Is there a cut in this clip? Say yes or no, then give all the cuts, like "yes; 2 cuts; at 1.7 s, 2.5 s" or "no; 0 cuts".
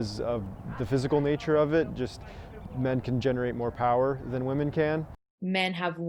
yes; 1 cut; at 5.2 s